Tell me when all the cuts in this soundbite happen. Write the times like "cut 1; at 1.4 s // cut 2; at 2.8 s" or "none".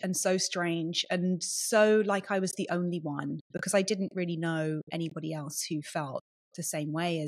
none

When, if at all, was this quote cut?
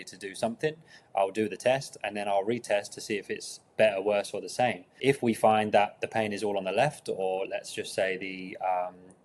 cut 1; at 4.9 s

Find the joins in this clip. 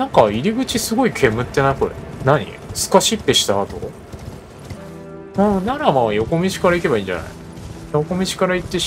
cut 1; at 4.9 s

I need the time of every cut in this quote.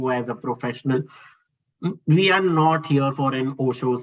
none

